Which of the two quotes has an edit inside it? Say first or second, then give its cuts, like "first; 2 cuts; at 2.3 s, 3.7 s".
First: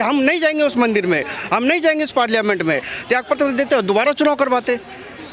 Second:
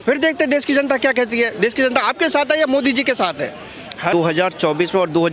second; 1 cut; at 4.1 s